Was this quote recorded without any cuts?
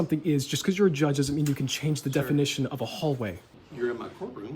no; 1 cut; at 3.6 s

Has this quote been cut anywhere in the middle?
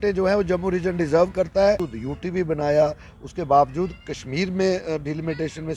yes; 1 cut; at 1.9 s

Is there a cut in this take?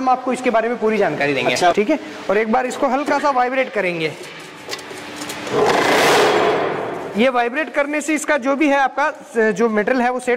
yes; 1 cut; at 1.7 s

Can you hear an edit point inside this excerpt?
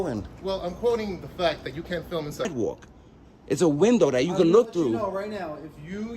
yes; 1 cut; at 2.4 s

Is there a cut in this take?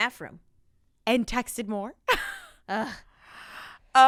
no; 0 cuts

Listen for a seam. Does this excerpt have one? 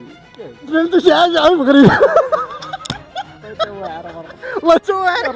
yes; 1 cut; at 3.5 s

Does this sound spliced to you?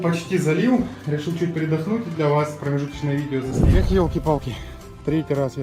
yes; 1 cut; at 3.6 s

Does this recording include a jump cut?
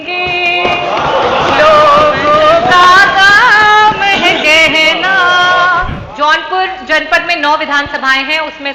yes; 1 cut; at 6.0 s

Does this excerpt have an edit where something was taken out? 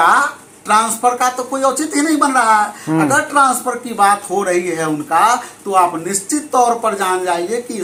no; 0 cuts

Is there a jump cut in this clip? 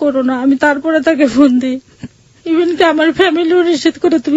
no; 0 cuts

